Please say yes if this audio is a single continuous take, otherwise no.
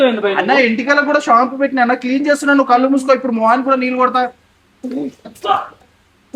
yes